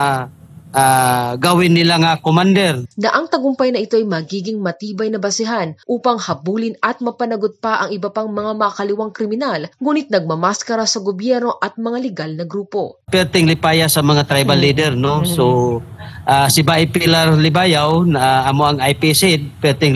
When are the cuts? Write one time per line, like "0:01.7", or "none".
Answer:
0:02.9
0:13.0